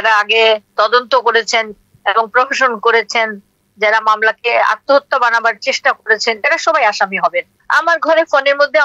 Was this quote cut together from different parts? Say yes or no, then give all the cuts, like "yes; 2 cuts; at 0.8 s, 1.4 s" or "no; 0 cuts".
yes; 1 cut; at 7.5 s